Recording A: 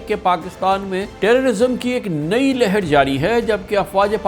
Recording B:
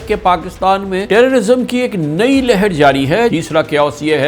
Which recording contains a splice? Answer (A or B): B